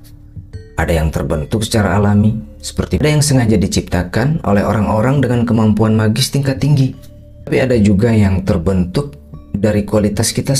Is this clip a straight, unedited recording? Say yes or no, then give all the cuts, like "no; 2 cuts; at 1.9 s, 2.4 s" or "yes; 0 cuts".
no; 2 cuts; at 3.0 s, 7.5 s